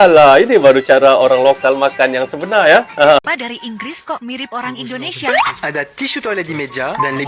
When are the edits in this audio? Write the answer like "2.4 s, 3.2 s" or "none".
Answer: 3.2 s